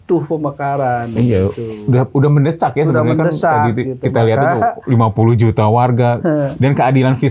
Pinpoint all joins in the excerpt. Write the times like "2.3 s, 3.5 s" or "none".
none